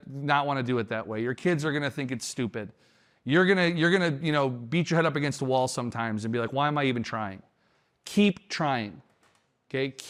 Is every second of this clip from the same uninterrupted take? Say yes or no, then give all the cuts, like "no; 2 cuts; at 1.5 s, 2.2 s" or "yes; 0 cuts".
yes; 0 cuts